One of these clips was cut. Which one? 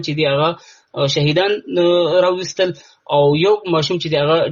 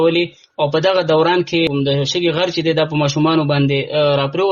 second; 1 cut; at 1.7 s

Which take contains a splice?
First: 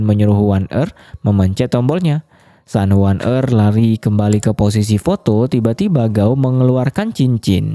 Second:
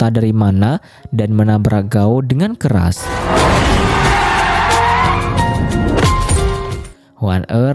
second; 1 cut; at 6.8 s

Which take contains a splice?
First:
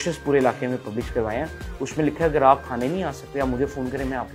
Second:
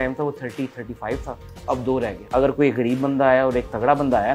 second; 1 cut; at 2.2 s

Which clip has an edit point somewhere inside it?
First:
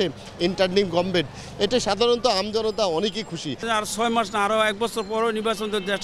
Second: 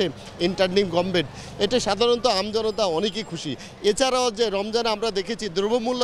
first; 1 cut; at 3.7 s

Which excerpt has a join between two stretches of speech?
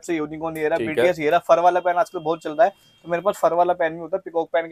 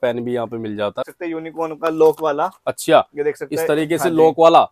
second; 1 cut; at 1.1 s

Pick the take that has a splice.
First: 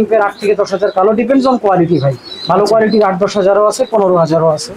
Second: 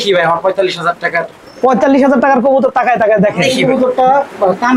second; 1 cut; at 3.6 s

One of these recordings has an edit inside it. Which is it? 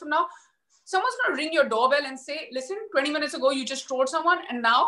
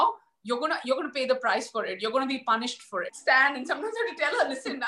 second; 1 cut; at 3.1 s

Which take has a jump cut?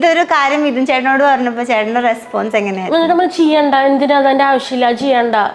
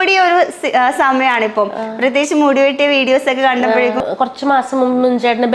second; 1 cut; at 4.0 s

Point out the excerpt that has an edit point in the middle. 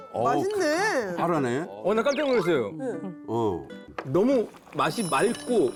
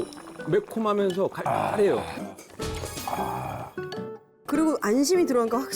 second; 1 cut; at 2.2 s

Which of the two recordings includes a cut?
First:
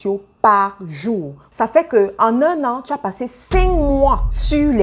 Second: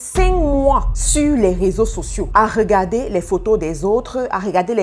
first; 1 cut; at 1.4 s

